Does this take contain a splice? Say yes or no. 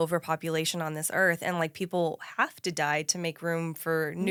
no